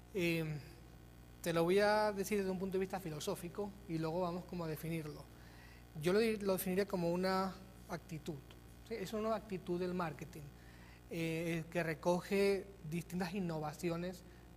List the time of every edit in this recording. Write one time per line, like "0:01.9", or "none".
0:01.3

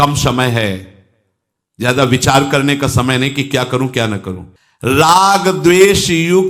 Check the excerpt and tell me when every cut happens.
none

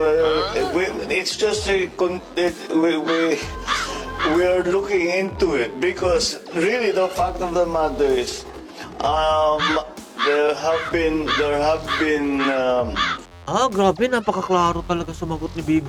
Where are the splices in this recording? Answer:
none

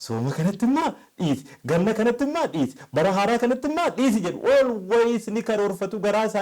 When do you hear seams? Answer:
none

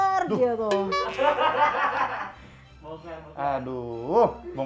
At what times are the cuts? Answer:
none

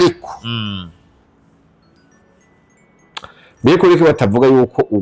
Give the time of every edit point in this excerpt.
none

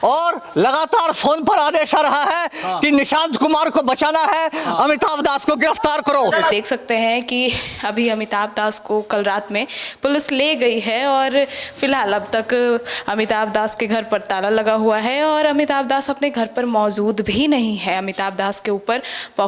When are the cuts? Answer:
0:06.5

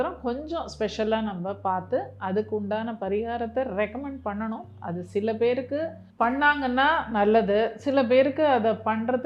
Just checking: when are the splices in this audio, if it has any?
none

